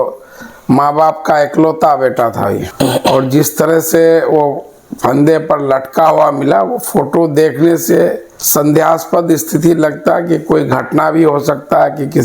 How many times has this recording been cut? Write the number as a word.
one